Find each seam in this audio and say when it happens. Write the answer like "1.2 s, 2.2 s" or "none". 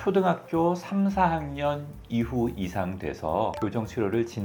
none